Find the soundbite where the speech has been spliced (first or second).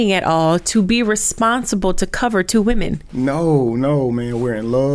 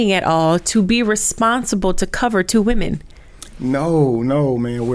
first